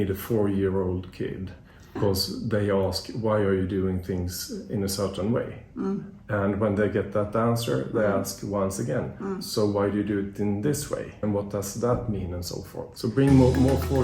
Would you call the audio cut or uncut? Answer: cut